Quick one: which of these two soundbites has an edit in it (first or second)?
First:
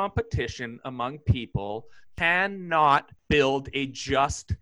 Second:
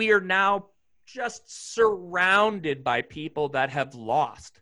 first